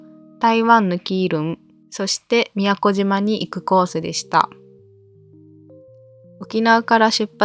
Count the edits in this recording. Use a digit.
2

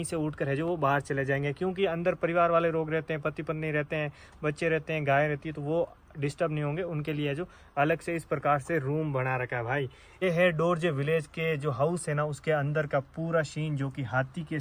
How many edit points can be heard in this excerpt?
0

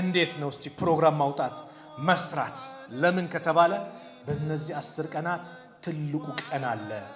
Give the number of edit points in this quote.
0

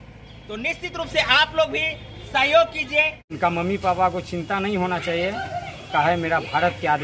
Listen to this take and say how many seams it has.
1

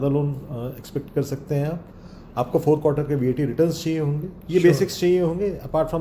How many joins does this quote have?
0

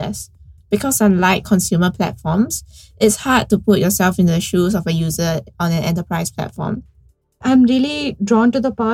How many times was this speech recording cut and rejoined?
1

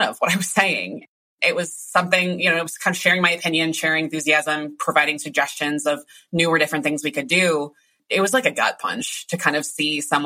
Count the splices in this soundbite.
2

